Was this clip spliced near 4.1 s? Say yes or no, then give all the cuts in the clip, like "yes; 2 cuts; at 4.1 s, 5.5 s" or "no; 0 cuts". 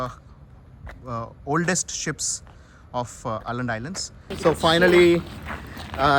yes; 1 cut; at 4.1 s